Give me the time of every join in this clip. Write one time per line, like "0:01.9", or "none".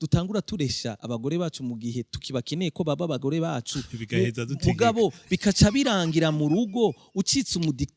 0:01.0